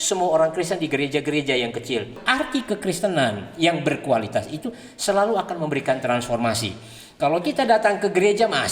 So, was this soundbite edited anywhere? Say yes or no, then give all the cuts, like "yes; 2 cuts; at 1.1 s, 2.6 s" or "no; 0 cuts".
yes; 1 cut; at 2.2 s